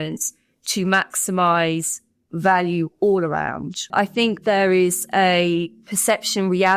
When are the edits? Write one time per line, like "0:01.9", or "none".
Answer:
0:03.9